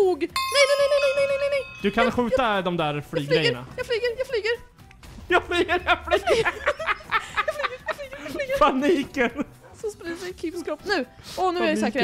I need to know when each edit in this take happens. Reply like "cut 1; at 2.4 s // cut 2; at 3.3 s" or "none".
none